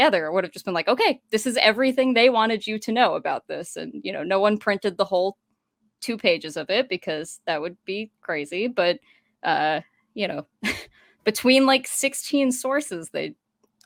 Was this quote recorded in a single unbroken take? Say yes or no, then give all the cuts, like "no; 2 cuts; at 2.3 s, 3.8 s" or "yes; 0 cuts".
yes; 0 cuts